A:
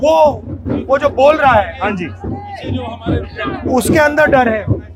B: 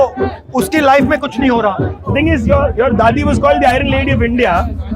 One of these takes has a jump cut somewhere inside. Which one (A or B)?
B